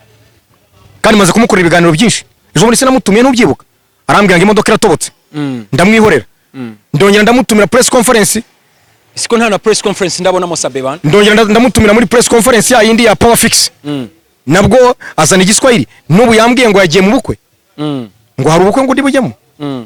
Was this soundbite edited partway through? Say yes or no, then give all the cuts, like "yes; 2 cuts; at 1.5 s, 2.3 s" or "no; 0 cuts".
no; 0 cuts